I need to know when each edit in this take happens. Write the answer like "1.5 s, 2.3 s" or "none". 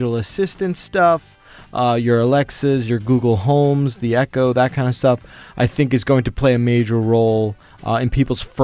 none